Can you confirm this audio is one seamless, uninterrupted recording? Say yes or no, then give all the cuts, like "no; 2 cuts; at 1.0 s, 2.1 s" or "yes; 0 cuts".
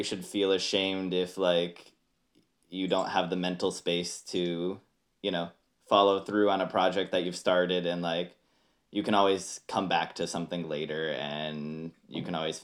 yes; 0 cuts